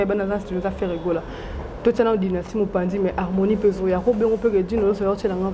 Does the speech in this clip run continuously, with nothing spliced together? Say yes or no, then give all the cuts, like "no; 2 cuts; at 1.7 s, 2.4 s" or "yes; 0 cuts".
yes; 0 cuts